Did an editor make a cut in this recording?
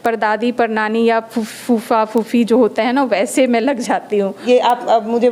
yes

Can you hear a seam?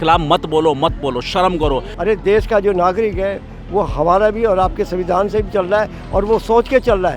yes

